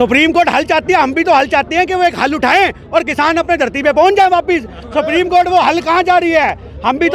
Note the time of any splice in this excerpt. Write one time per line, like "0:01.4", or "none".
none

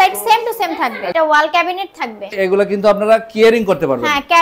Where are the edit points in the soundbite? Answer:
0:01.0
0:02.4

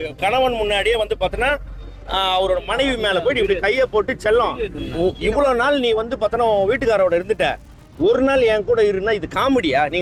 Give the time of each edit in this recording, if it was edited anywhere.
none

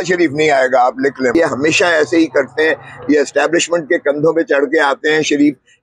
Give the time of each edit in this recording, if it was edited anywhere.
0:01.4

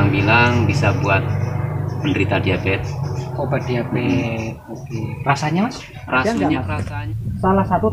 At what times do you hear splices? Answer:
0:06.6

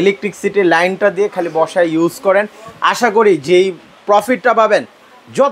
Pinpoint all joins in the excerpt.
none

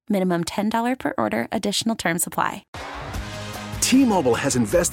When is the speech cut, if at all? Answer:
0:02.7

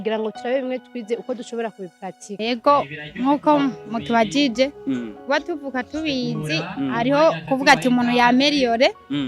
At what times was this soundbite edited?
0:02.4

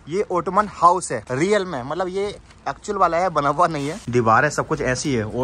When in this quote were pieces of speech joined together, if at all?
0:01.2
0:04.0

